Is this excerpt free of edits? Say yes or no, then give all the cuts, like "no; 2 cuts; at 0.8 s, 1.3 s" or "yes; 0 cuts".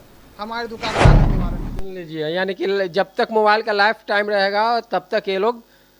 no; 2 cuts; at 0.9 s, 1.5 s